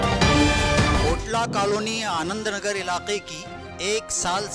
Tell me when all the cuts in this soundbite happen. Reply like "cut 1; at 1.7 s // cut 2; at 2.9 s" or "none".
none